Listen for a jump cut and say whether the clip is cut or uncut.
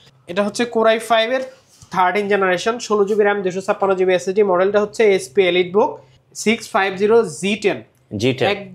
uncut